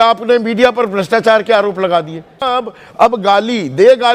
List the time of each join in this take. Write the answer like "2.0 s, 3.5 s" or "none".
2.4 s